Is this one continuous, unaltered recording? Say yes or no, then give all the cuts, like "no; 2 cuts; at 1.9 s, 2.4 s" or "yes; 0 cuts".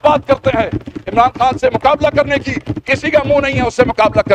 yes; 0 cuts